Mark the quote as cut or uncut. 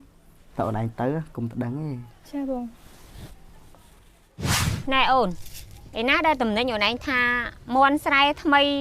cut